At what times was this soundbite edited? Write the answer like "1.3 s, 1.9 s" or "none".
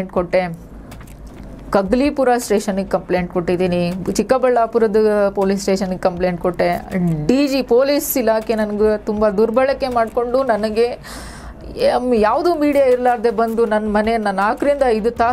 none

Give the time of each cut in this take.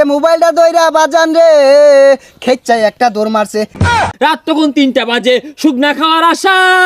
3.9 s

